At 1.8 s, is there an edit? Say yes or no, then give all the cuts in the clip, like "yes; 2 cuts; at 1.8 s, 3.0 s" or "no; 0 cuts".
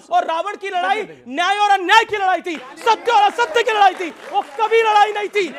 no; 0 cuts